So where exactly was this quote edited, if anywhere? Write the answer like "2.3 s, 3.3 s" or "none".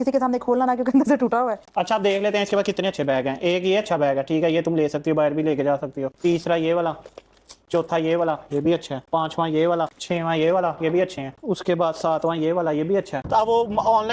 1.6 s, 13.2 s

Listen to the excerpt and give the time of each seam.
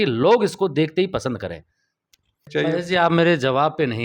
2.8 s

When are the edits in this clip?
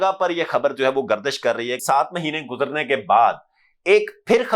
1.8 s

